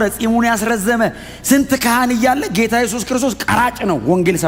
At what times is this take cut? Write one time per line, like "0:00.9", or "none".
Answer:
none